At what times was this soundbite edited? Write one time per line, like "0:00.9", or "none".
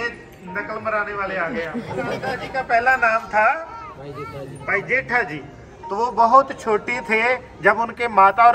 none

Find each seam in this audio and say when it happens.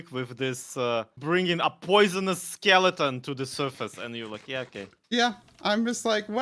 0:01.2
0:05.0

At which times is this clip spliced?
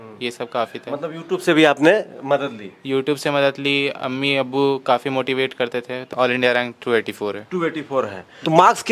0:06.1

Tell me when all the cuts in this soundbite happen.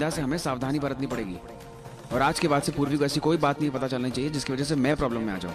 none

